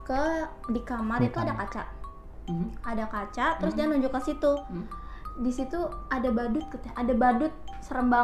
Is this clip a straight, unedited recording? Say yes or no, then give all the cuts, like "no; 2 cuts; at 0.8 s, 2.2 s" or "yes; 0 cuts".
yes; 0 cuts